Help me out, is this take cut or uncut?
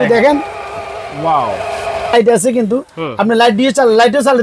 cut